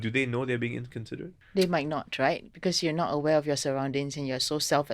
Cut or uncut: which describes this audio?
cut